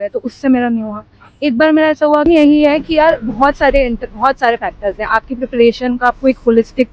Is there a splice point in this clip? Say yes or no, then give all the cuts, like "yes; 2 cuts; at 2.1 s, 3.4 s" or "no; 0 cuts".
yes; 1 cut; at 2.3 s